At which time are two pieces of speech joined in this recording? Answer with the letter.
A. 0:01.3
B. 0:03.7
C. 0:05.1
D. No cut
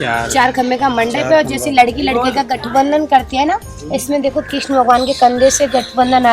D